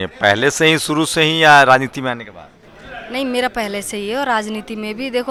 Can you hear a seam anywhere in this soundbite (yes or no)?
no